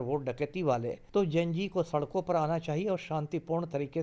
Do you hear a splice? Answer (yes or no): yes